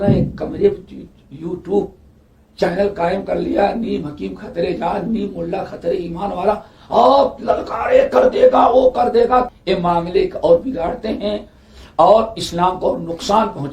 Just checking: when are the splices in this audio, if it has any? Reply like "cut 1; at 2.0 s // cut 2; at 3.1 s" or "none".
cut 1; at 9.5 s

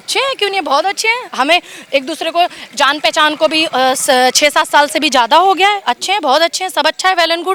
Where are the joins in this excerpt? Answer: none

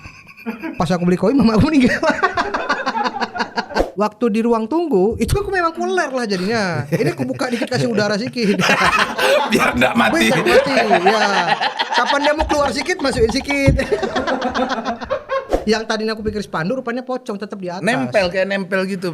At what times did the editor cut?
cut 1; at 3.9 s // cut 2; at 15.5 s

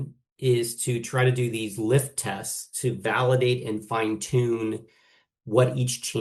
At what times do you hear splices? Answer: none

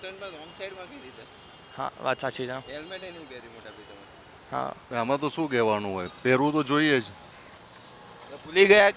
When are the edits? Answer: cut 1; at 4.8 s

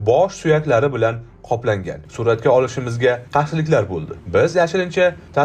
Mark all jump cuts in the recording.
cut 1; at 2.0 s

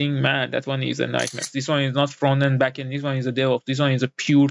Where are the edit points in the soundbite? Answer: cut 1; at 1.5 s

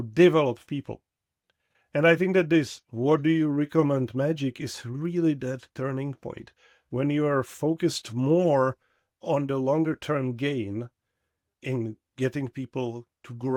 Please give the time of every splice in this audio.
none

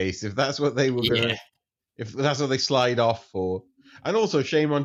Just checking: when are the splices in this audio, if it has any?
none

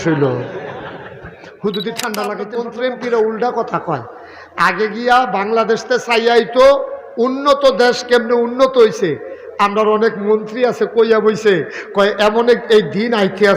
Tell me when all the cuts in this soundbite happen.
cut 1; at 2.6 s

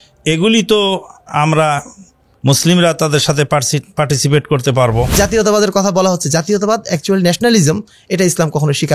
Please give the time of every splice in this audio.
cut 1; at 5.1 s

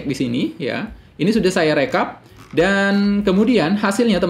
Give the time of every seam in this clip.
none

